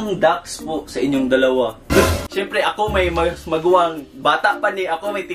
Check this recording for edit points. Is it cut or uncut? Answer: cut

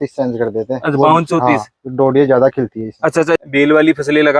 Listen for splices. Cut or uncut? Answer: cut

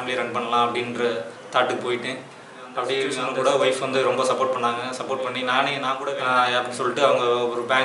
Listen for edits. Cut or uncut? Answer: cut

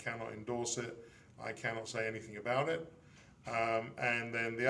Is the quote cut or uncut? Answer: uncut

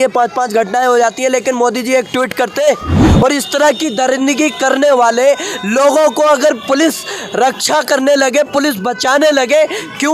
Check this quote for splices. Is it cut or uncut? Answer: cut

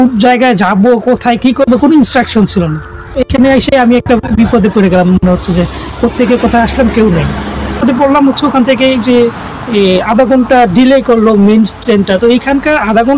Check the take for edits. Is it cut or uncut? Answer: cut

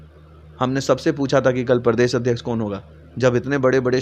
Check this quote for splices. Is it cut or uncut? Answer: uncut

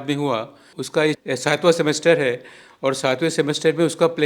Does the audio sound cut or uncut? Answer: cut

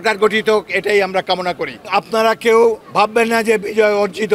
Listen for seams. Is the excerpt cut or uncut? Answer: cut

